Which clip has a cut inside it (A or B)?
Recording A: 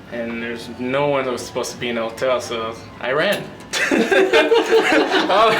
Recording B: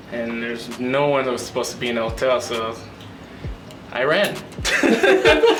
A